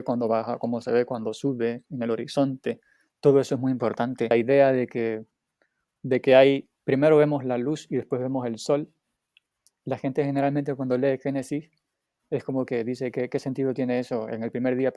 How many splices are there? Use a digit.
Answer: 1